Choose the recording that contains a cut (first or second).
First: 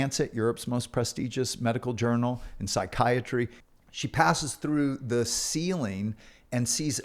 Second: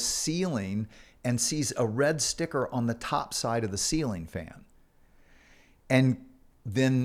first